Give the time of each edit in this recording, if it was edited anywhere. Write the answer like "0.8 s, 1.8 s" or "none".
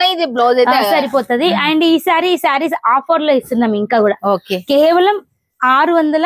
none